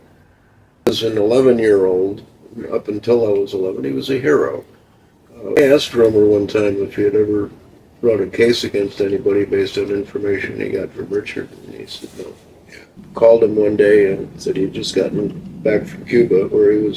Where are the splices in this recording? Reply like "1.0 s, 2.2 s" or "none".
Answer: 1.0 s, 5.6 s, 13.0 s